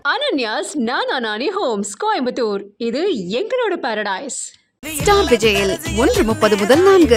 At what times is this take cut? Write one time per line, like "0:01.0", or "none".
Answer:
none